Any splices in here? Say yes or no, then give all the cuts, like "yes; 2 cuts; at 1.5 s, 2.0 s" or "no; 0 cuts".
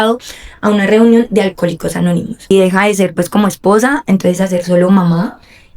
yes; 1 cut; at 2.5 s